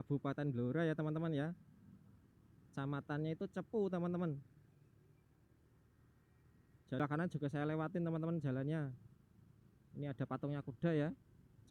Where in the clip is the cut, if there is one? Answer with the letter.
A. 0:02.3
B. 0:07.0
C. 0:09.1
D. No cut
B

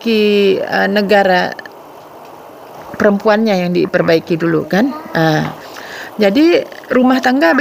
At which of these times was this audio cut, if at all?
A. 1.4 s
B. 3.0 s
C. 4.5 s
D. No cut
D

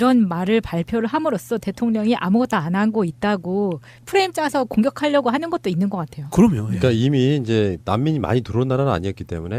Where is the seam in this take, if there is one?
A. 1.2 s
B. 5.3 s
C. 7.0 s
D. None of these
B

